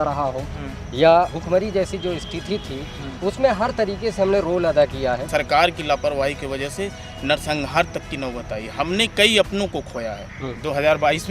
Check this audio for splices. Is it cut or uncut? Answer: cut